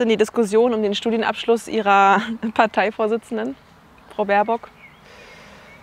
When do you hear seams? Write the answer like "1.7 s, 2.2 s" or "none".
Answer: none

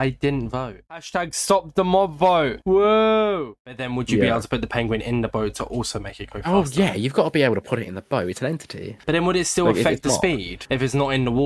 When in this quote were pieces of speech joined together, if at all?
1.0 s, 3.8 s

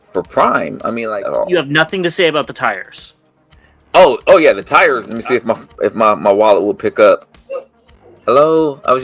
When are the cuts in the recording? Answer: 1.0 s, 5.1 s

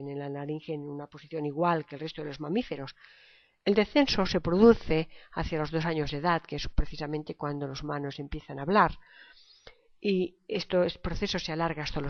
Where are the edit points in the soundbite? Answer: 4.9 s

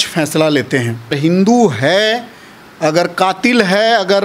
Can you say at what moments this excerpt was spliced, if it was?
1.2 s

